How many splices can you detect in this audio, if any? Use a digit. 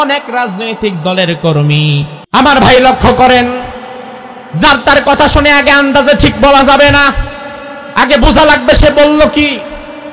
1